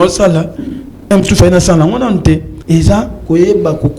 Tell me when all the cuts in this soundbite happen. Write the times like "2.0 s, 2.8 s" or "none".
2.5 s